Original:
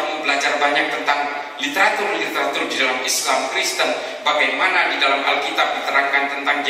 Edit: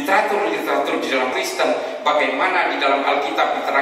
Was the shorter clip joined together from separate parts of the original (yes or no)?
yes